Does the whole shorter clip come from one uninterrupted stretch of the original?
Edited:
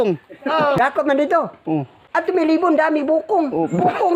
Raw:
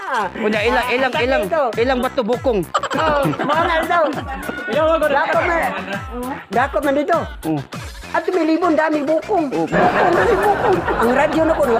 no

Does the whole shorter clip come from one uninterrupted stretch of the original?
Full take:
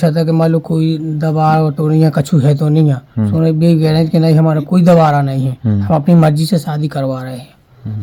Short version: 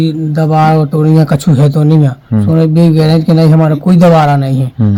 yes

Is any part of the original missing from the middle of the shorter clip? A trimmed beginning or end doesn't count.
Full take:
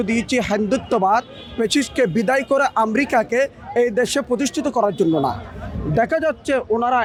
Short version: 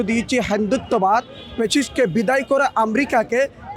no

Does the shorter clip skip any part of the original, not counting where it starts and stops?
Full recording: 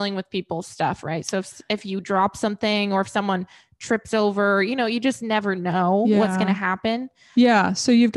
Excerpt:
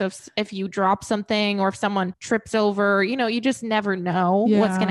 yes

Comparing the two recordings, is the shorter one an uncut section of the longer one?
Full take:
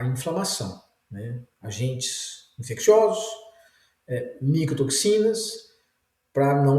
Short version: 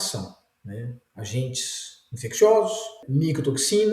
no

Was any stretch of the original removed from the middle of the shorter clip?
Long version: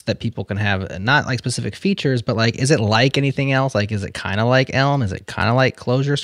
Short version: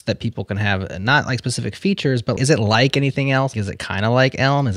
yes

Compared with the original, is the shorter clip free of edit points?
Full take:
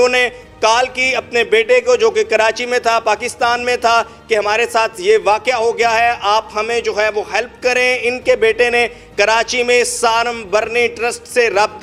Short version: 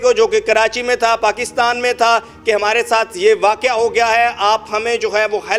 yes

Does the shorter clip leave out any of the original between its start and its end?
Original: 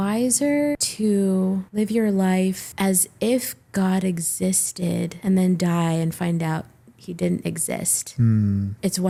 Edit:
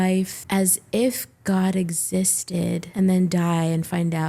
no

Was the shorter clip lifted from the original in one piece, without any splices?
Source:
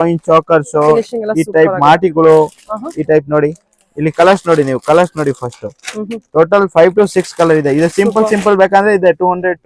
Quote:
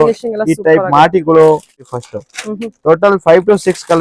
no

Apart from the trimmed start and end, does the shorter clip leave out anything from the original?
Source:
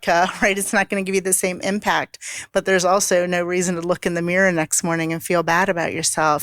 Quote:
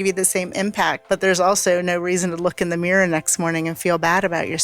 yes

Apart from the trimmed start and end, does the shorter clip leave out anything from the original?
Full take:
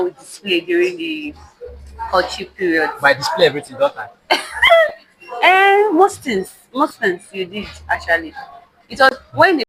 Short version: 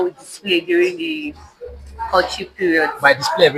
no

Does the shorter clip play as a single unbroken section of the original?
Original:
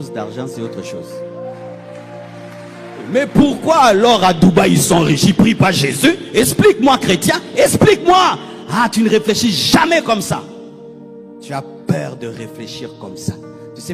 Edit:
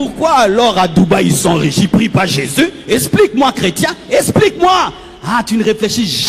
yes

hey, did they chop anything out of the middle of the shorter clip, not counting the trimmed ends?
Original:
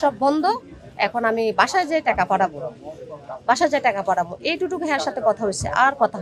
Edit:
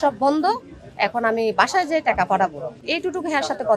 yes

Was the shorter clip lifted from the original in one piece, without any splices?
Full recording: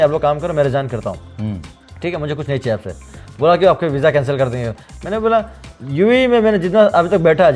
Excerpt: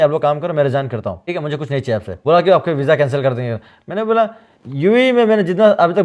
no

